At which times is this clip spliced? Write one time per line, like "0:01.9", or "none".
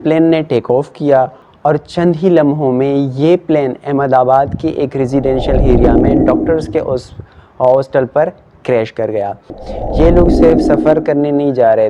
0:01.4
0:09.6

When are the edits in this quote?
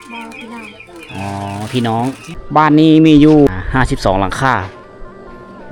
0:02.3
0:03.5

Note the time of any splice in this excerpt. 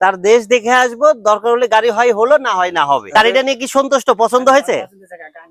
0:03.1

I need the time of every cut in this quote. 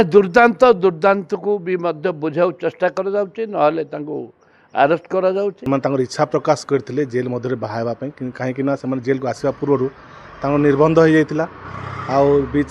0:05.6

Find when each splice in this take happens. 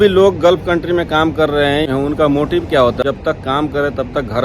0:01.9
0:03.0

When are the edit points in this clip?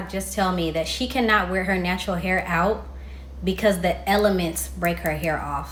none

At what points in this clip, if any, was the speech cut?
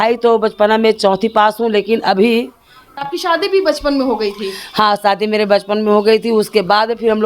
0:03.1

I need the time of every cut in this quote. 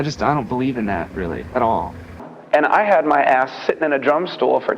0:02.3

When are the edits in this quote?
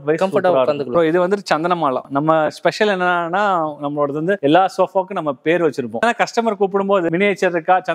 0:00.9

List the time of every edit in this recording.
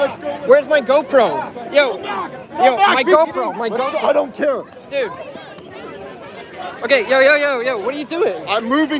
none

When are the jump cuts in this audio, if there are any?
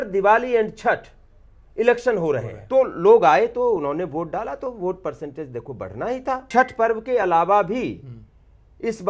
0:02.5
0:06.4

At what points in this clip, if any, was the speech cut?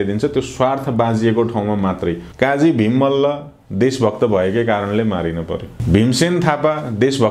0:02.2
0:05.8

